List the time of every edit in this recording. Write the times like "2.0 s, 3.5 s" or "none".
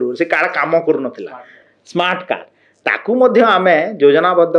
none